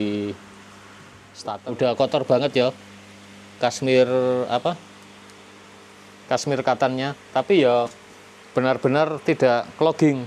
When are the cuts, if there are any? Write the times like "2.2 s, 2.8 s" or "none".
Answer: 1.5 s